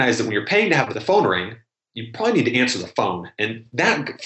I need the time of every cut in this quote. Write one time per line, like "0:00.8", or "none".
0:00.9